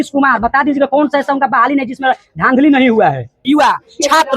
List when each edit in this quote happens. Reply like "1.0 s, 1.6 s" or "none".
3.4 s